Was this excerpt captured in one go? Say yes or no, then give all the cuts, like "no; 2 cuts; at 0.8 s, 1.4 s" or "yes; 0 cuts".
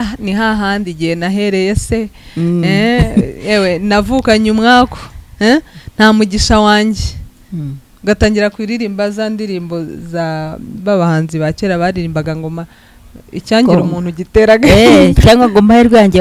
yes; 0 cuts